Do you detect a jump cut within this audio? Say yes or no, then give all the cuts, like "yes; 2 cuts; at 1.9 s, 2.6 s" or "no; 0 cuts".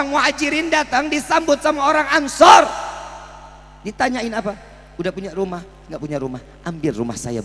no; 0 cuts